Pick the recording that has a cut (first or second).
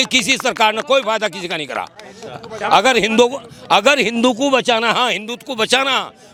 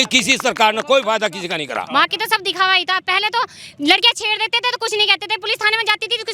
second